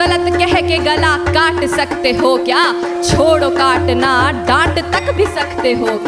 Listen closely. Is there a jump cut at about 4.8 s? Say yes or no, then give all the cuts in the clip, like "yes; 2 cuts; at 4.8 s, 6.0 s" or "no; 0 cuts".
no; 0 cuts